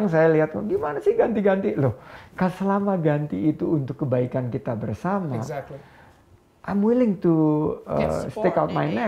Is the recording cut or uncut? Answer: uncut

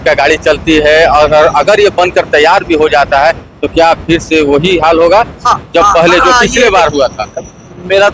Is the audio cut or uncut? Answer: uncut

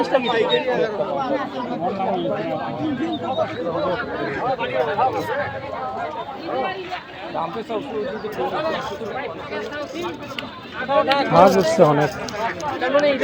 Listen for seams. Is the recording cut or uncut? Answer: uncut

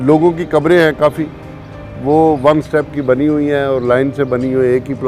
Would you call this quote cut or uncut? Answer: uncut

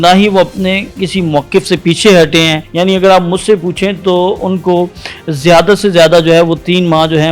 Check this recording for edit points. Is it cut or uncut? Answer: cut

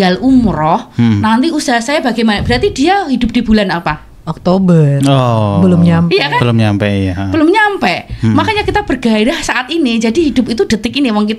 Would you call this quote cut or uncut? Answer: uncut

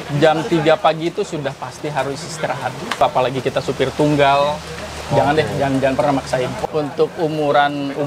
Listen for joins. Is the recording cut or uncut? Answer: cut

